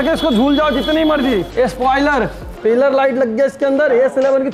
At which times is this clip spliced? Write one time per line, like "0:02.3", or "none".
0:01.5
0:02.4